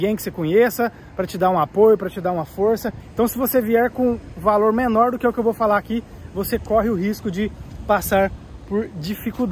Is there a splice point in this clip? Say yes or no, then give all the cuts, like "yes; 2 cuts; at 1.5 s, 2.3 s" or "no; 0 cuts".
no; 0 cuts